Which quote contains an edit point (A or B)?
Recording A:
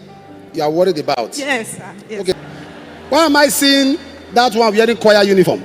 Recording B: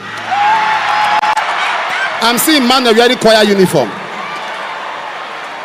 A